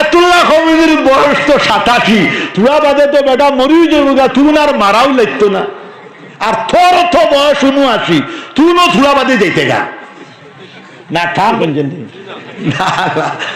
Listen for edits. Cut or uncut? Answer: cut